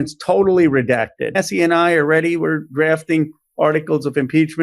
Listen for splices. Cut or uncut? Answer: cut